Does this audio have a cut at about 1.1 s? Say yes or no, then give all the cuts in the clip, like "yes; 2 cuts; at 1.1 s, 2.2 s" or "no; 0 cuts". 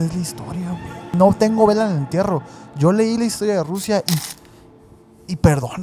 yes; 1 cut; at 1.1 s